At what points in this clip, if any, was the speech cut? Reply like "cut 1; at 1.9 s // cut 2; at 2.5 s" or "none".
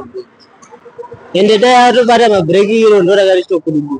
none